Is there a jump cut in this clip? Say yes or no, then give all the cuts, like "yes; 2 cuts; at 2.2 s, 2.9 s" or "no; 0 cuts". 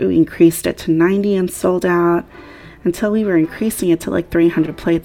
no; 0 cuts